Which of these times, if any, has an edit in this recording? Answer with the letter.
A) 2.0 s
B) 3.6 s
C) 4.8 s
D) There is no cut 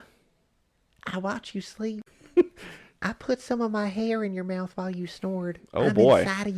A